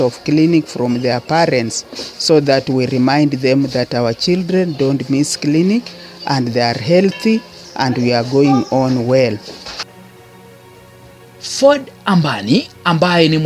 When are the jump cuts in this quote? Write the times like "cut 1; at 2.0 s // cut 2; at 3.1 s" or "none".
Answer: none

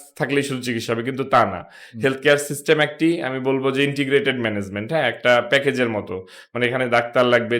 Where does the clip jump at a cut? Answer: none

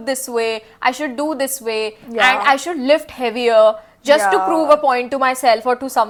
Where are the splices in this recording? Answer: none

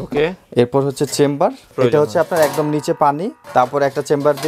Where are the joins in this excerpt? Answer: cut 1; at 1.7 s // cut 2; at 3.3 s

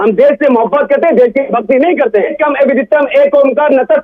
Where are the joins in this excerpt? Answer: cut 1; at 2.3 s

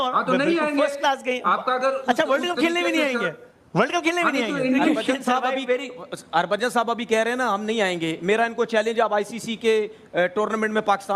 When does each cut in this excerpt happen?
cut 1; at 5.0 s

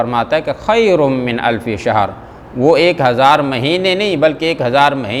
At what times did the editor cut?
none

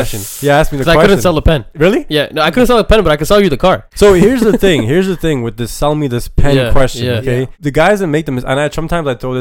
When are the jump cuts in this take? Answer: cut 1; at 1.7 s // cut 2; at 3.9 s // cut 3; at 7.6 s

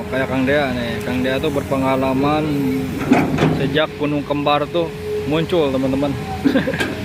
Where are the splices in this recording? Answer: none

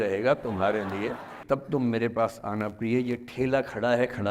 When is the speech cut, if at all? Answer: cut 1; at 1.4 s

